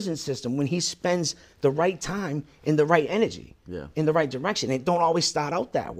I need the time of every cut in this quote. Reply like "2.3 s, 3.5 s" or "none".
none